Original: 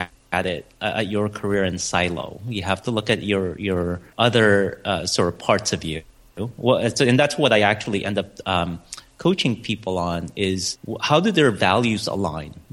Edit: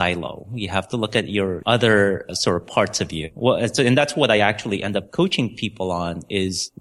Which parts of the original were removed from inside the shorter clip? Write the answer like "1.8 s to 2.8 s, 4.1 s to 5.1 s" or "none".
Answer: 3.5 s to 4.1 s, 4.8 s to 5.0 s, 6.0 s to 6.5 s, 8.3 s to 9.1 s